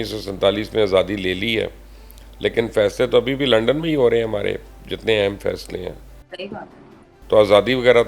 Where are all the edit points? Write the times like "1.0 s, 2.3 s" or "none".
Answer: none